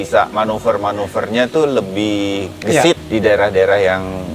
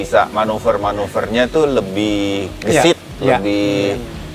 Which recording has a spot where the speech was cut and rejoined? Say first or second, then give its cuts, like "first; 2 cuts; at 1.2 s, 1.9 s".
first; 1 cut; at 3.0 s